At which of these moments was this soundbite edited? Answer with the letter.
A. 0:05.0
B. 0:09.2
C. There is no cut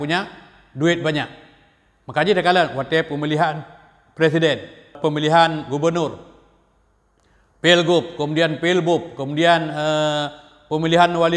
A